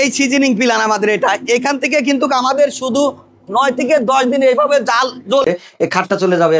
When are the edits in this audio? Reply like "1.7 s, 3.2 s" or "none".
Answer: 5.5 s